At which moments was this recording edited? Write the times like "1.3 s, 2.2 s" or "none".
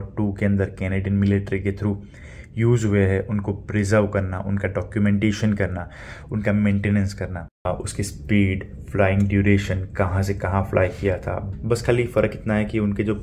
7.7 s, 11.5 s